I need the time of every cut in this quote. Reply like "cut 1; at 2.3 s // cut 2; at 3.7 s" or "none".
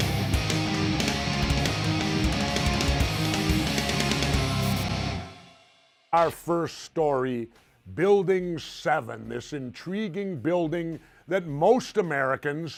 none